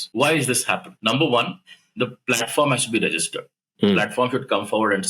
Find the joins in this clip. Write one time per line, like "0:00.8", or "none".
0:01.0